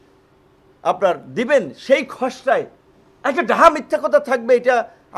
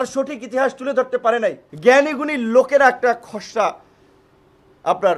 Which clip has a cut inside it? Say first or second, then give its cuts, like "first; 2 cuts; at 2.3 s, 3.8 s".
second; 1 cut; at 1.7 s